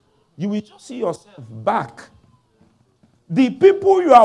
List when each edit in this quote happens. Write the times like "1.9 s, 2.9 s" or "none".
none